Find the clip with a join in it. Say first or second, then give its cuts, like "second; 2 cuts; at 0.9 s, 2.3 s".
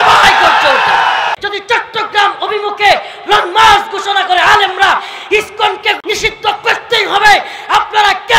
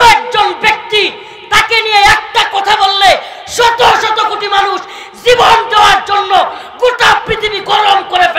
first; 2 cuts; at 1.4 s, 6.0 s